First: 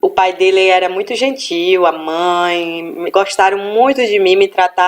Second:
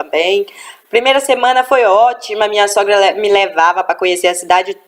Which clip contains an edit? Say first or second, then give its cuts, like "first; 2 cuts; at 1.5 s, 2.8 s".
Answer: first; 1 cut; at 1.8 s